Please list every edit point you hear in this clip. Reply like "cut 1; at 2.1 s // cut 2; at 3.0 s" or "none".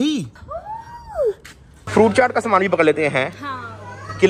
cut 1; at 1.8 s